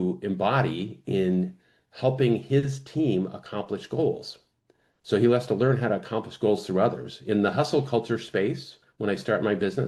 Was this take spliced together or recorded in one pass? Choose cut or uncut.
uncut